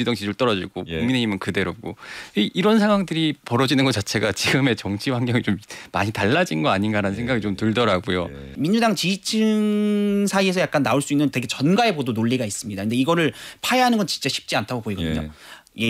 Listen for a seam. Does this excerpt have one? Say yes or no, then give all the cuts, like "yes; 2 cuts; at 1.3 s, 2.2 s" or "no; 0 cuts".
yes; 1 cut; at 8.5 s